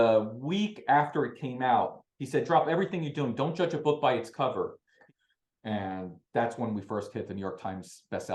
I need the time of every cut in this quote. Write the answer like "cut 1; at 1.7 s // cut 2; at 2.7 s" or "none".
cut 1; at 5.0 s

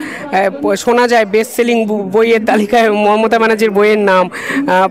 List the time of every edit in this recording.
none

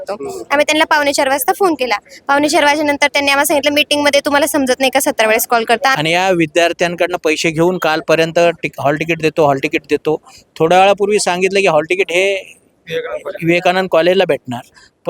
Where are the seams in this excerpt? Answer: cut 1; at 5.9 s

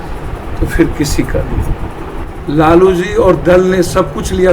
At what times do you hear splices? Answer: cut 1; at 2.3 s

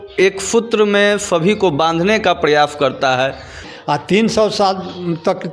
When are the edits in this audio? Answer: cut 1; at 3.6 s

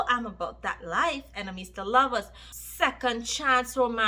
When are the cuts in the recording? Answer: cut 1; at 2.5 s

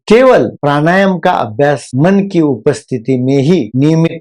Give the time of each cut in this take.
none

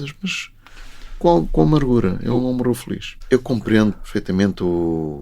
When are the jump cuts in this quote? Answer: cut 1; at 3.1 s // cut 2; at 4.1 s

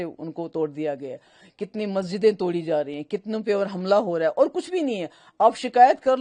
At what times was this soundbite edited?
none

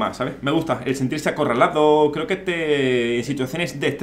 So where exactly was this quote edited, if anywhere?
none

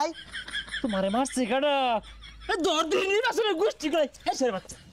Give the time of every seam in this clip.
none

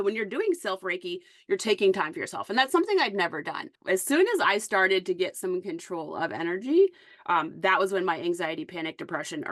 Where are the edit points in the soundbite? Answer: cut 1; at 3.7 s

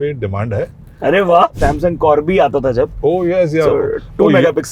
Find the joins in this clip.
cut 1; at 1.5 s

